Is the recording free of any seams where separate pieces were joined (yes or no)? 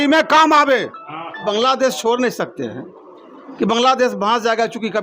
no